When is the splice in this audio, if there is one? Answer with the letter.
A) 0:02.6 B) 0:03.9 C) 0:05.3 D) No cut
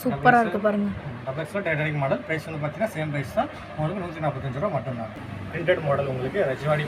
C